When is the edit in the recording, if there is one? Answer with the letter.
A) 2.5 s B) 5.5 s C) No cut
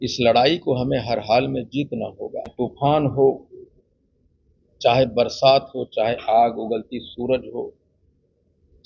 A